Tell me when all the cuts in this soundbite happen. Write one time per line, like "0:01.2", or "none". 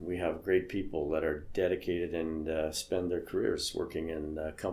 none